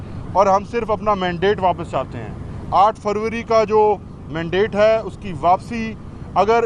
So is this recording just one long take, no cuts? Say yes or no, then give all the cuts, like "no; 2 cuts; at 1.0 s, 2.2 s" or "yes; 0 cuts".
yes; 0 cuts